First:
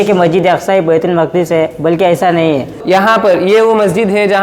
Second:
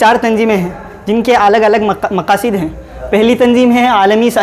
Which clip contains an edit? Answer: first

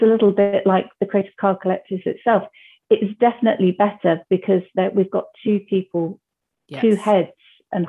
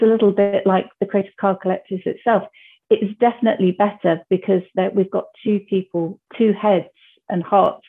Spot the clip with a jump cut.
second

